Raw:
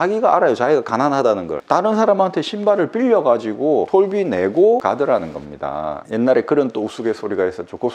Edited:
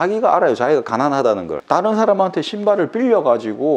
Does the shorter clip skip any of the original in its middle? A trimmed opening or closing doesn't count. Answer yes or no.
no